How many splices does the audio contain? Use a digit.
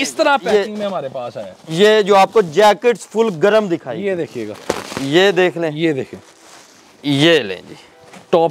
1